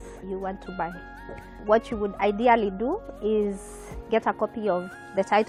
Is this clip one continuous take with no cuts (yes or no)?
yes